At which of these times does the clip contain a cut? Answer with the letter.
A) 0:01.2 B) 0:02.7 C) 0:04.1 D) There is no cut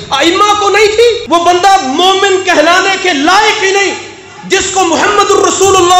A